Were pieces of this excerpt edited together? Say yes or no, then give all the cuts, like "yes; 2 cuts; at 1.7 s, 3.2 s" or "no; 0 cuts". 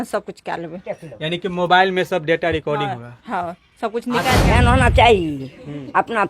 yes; 1 cut; at 4.4 s